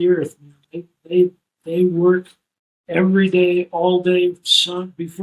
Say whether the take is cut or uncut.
uncut